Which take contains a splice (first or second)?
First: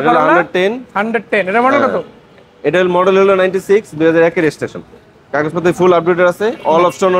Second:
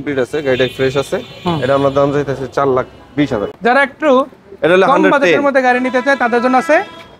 second